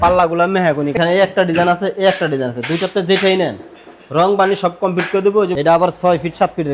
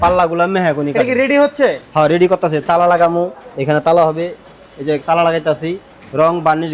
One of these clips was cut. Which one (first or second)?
first